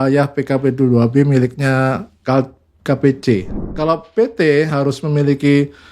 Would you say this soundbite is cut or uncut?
cut